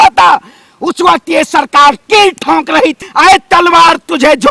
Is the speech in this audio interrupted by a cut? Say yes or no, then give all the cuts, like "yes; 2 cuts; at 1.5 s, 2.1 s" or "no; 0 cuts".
yes; 1 cut; at 3.0 s